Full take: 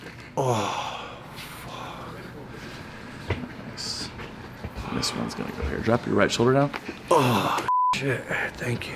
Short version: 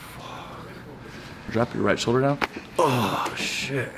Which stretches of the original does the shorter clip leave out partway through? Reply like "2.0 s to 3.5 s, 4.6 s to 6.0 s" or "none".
3.0 s to 5.8 s